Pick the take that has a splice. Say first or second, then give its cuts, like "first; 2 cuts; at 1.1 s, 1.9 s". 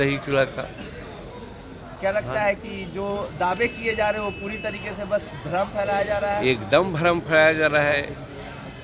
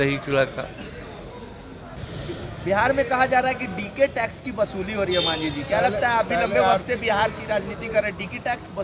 second; 1 cut; at 1.9 s